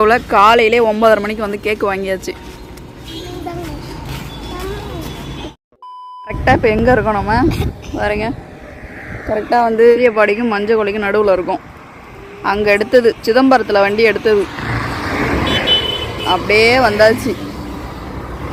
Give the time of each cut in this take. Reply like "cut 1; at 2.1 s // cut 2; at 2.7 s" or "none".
none